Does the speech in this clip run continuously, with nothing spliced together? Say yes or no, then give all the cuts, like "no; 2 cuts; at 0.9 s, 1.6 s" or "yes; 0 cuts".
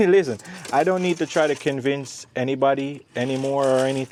yes; 0 cuts